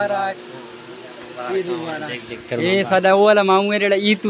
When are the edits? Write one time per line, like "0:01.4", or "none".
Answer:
none